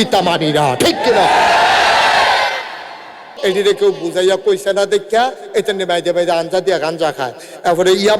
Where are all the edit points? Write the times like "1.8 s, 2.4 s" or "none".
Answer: 3.3 s

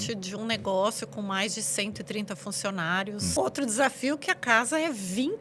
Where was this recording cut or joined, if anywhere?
3.3 s

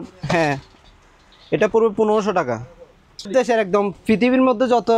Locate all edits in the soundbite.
3.3 s

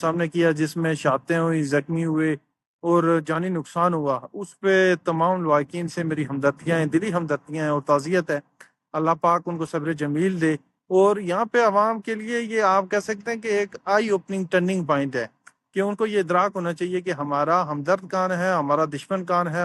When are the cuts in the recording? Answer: none

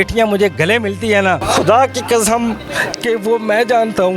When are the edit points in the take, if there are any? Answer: 1.4 s

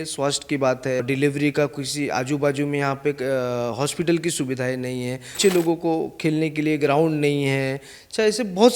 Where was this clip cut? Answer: 1.0 s, 5.4 s

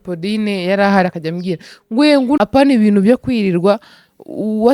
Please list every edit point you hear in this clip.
2.4 s

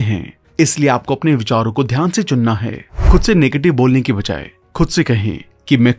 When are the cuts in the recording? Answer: 2.9 s

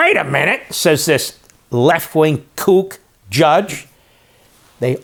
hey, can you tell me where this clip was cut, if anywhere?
none

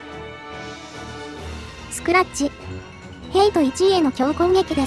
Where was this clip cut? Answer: 2.1 s

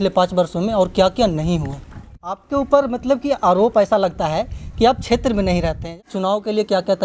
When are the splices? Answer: 2.4 s, 5.8 s

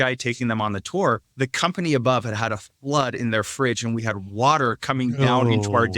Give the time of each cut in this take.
1.3 s

